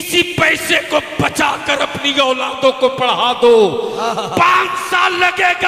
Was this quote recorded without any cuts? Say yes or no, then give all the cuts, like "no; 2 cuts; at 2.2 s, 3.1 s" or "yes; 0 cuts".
yes; 0 cuts